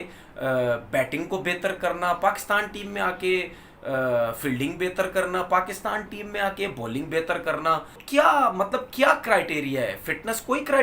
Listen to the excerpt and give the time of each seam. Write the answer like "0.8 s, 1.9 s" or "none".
8.0 s